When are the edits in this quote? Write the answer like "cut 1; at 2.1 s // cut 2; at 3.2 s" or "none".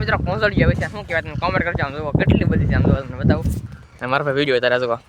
none